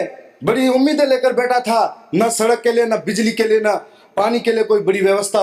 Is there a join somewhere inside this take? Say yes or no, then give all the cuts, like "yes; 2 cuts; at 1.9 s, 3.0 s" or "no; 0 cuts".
no; 0 cuts